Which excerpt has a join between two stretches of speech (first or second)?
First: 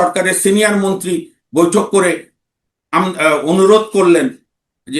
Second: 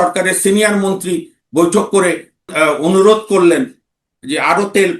second